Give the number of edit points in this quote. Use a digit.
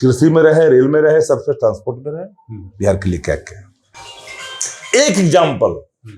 0